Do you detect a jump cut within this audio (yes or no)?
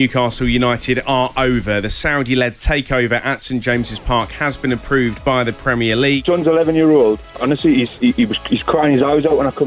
yes